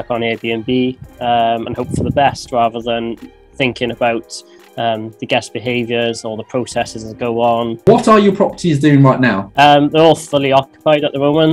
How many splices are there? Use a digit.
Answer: 2